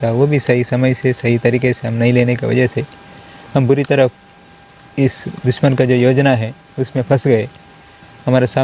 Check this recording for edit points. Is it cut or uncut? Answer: uncut